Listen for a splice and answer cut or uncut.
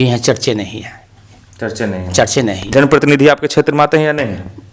uncut